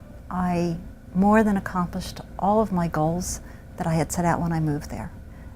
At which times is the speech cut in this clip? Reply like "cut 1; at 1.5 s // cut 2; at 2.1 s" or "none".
cut 1; at 4.1 s